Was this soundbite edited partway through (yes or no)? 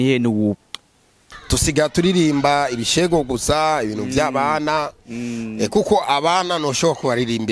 yes